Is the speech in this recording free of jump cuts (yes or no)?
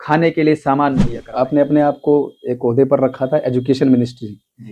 no